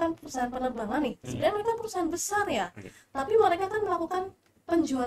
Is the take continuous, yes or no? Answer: yes